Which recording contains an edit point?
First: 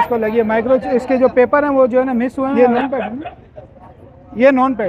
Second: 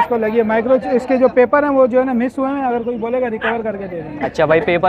first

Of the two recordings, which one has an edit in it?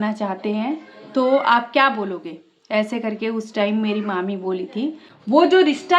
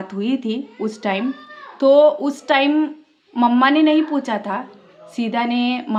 first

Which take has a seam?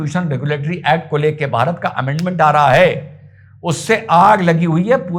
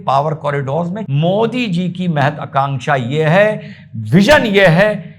second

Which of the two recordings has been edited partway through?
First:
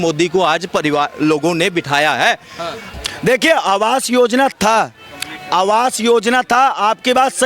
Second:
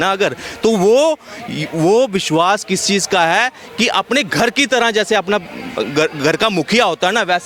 first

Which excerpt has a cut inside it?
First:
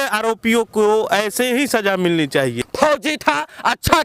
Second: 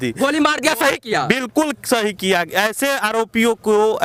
first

